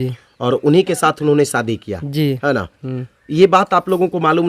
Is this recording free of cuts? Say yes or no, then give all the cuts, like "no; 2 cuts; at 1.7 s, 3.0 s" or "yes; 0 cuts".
yes; 0 cuts